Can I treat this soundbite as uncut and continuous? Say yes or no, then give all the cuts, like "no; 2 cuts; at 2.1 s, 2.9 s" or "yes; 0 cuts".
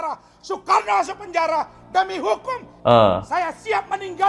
no; 1 cut; at 2.7 s